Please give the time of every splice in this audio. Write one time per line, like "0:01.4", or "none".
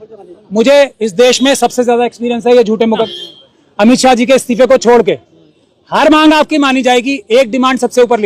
0:03.1